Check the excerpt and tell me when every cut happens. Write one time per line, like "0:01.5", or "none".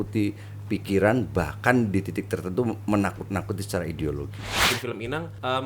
0:04.6